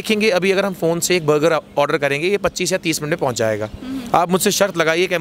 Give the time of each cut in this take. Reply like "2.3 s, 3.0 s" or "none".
none